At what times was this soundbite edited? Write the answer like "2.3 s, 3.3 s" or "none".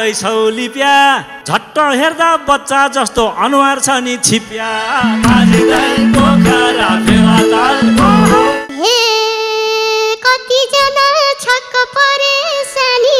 8.6 s